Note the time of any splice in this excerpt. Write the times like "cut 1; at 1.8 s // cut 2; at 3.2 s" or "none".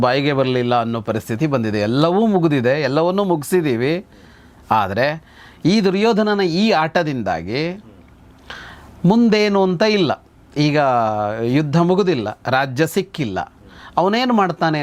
none

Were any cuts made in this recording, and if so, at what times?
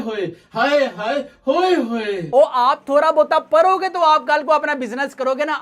cut 1; at 2.3 s

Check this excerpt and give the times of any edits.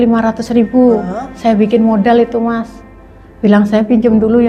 none

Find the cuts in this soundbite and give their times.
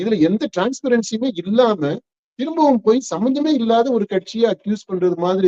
none

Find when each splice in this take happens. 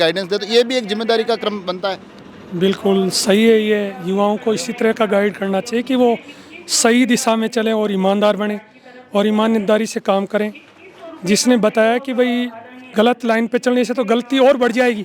none

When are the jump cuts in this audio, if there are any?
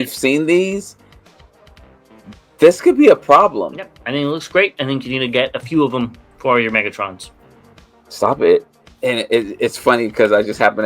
cut 1; at 4.0 s // cut 2; at 8.8 s

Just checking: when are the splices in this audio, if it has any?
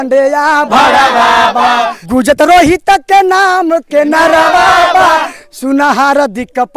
cut 1; at 2.0 s

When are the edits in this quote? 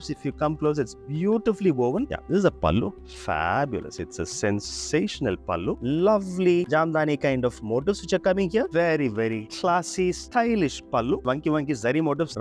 cut 1; at 2.1 s // cut 2; at 5.8 s // cut 3; at 8.7 s

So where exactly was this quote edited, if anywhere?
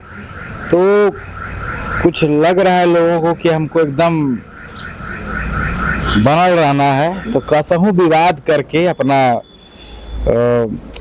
none

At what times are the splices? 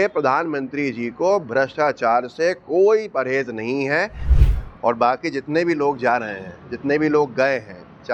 cut 1; at 4.2 s

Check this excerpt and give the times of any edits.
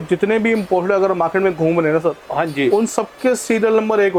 none

